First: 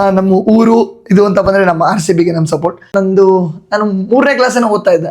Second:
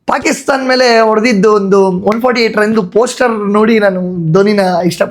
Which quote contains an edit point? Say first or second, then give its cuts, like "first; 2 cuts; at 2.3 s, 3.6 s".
first; 1 cut; at 2.8 s